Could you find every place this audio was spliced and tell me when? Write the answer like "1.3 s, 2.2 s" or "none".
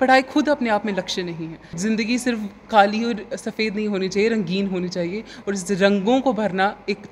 1.8 s